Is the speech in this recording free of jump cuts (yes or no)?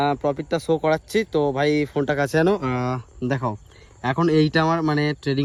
yes